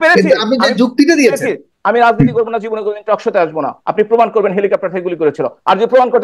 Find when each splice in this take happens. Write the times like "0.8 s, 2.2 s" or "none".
1.7 s